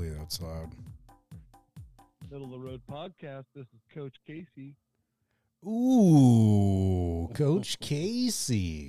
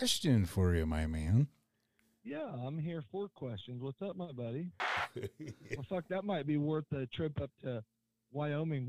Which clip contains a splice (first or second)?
second